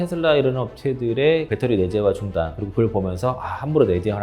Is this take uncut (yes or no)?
no